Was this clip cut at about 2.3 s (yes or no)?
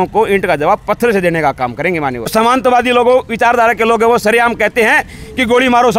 yes